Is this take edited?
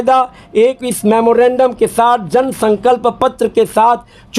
no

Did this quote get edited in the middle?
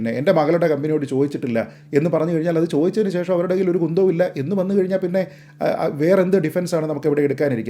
no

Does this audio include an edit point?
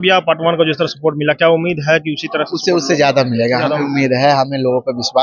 no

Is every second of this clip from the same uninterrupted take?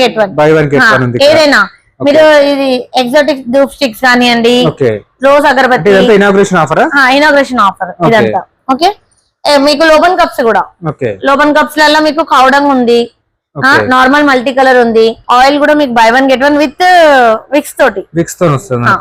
no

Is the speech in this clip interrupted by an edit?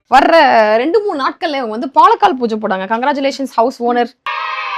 no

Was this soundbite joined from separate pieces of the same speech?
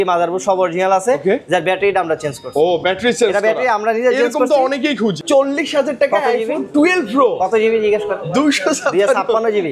yes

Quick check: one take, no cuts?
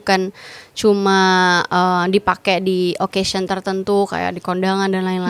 yes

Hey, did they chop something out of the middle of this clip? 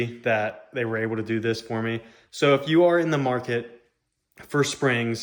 no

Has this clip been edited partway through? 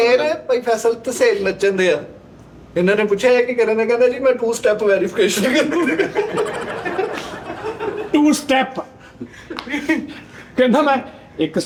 no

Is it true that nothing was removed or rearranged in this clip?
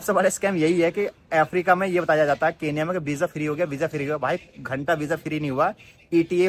yes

